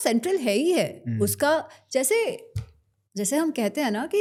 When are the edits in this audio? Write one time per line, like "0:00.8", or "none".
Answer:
none

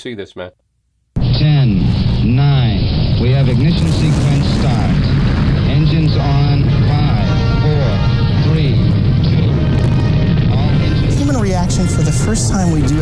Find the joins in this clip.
none

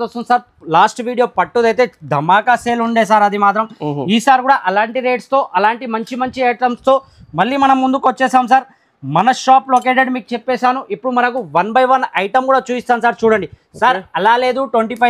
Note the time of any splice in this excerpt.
none

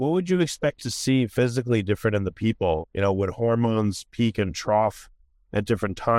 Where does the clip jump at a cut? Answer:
none

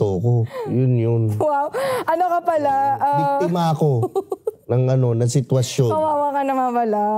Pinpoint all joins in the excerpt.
none

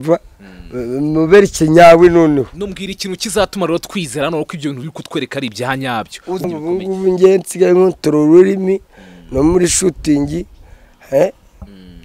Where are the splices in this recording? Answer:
0:06.4

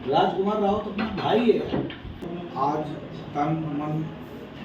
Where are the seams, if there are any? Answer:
0:02.3

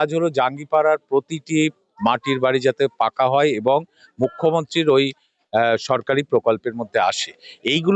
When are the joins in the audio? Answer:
none

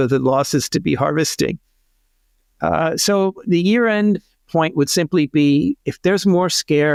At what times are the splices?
none

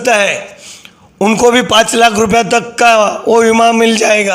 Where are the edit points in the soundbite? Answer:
none

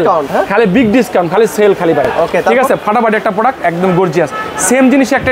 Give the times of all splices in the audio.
none

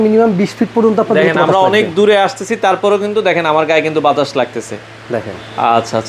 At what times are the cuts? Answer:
none

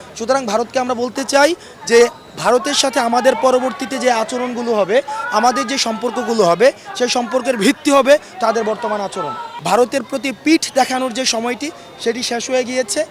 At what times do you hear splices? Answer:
0:09.5

